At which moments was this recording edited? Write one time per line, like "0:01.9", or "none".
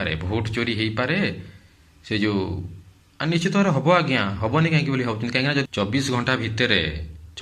0:05.7